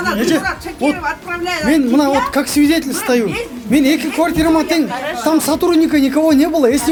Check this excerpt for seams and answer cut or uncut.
uncut